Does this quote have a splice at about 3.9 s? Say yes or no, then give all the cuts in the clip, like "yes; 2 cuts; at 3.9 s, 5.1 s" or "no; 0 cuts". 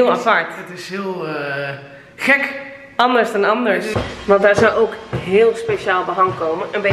yes; 1 cut; at 3.9 s